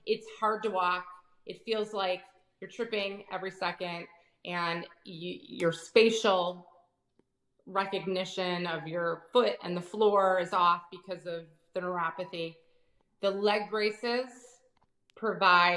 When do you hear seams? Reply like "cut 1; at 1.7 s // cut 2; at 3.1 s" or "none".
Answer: none